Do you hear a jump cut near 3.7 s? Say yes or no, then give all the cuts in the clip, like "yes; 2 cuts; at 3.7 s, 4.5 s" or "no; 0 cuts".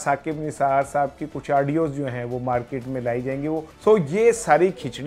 yes; 1 cut; at 3.7 s